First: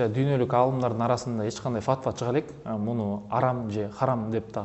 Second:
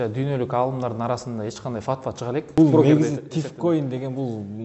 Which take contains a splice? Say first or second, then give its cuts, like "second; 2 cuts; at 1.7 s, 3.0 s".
second; 1 cut; at 2.5 s